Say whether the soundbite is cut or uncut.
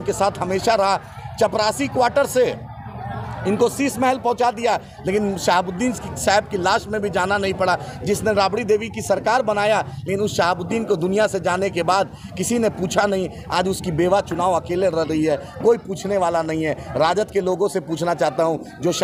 uncut